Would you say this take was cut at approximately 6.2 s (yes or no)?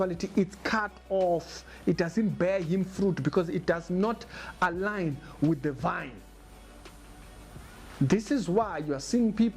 no